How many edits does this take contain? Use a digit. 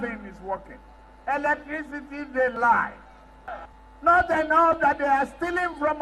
1